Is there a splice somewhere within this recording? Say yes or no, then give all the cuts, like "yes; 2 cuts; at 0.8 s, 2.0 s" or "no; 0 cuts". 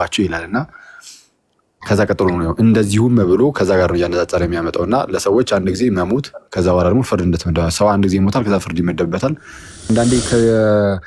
yes; 1 cut; at 9.9 s